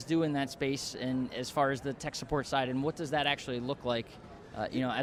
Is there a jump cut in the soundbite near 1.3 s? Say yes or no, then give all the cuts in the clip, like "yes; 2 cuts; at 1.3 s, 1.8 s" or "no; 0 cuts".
no; 0 cuts